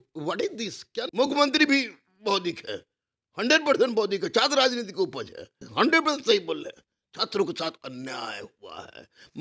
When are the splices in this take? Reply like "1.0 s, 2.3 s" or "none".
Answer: 1.1 s, 5.6 s